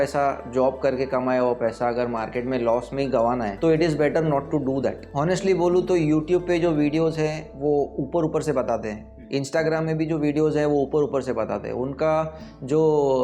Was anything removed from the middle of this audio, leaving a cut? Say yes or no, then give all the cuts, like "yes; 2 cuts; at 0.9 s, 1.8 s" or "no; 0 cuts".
yes; 2 cuts; at 3.5 s, 5.0 s